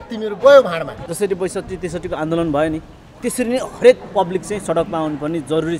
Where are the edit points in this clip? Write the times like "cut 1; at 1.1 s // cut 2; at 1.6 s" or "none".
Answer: cut 1; at 1.0 s

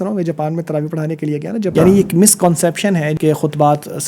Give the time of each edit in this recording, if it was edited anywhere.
cut 1; at 1.7 s // cut 2; at 3.1 s

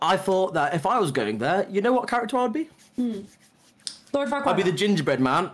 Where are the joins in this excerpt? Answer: none

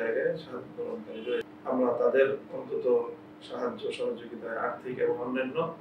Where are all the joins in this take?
cut 1; at 1.5 s

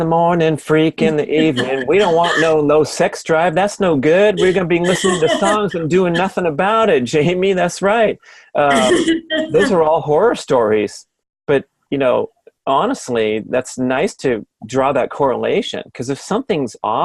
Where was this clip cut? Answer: none

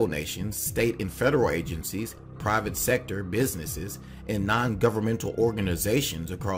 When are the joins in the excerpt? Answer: cut 1; at 5.6 s

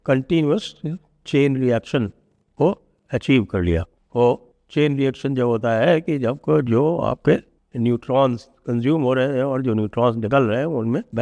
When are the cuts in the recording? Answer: none

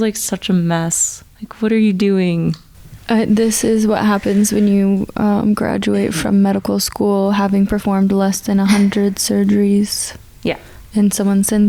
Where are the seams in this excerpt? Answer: none

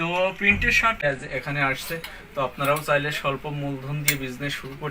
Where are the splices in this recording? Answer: cut 1; at 1.0 s

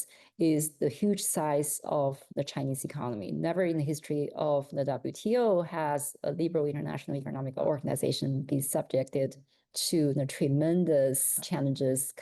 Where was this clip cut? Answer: none

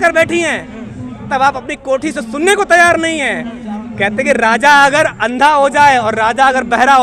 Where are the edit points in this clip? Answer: none

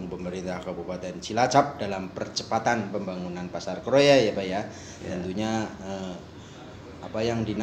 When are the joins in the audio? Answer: none

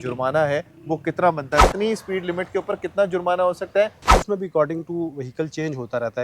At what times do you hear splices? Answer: cut 1; at 1.6 s // cut 2; at 4.1 s

